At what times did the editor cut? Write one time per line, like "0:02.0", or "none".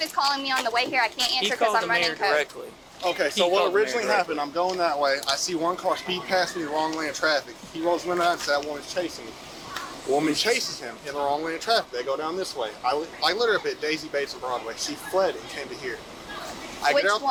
none

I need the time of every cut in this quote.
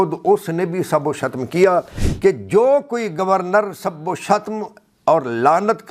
0:02.0

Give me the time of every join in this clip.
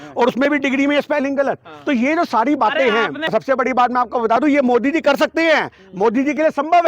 0:03.3

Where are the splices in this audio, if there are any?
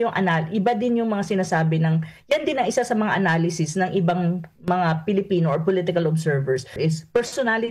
0:06.8

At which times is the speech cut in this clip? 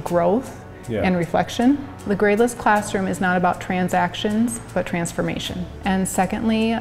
0:01.9
0:05.7

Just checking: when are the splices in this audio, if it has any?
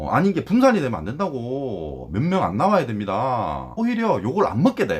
0:03.7

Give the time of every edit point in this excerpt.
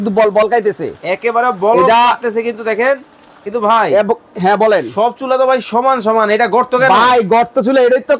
0:03.4

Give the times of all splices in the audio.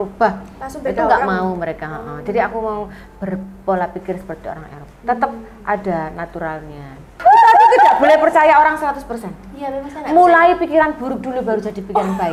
0:07.1

